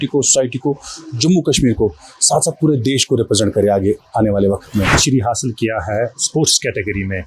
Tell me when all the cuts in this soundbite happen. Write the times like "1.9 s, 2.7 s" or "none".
5.0 s